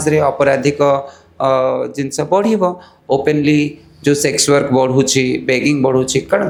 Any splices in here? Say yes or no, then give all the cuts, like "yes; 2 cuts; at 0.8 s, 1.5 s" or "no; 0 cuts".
no; 0 cuts